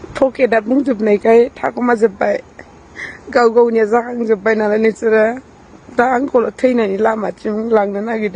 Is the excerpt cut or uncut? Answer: uncut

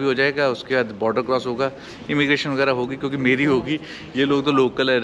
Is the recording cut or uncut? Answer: uncut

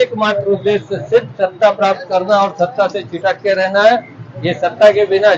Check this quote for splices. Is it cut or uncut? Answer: uncut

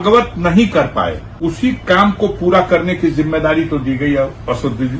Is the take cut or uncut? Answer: cut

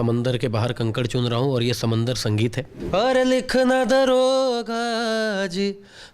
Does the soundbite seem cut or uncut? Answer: cut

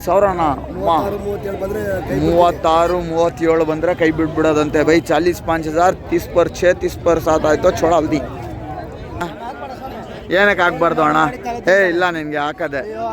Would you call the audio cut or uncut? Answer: cut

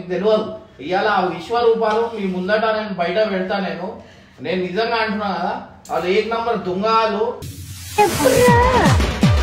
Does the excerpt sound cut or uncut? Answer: uncut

